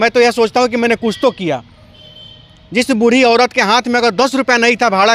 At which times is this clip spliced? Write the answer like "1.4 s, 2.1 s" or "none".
none